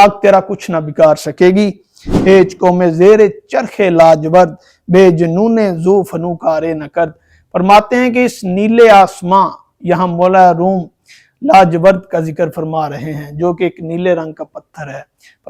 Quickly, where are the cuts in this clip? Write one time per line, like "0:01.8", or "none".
0:02.1

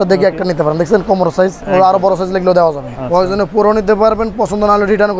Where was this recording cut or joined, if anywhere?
0:01.6
0:02.9

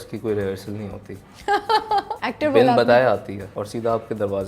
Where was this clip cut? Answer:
0:02.2
0:03.4

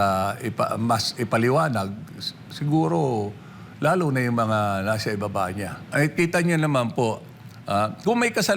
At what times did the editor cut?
0:05.8

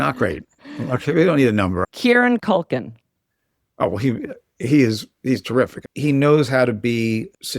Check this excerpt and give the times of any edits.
0:01.8
0:05.9

